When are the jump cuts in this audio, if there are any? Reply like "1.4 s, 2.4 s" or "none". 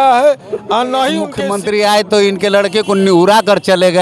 1.3 s